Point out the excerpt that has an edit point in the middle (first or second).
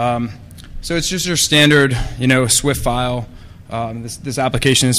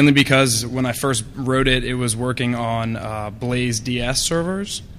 first